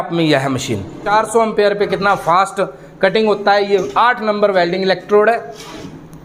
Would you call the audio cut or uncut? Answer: cut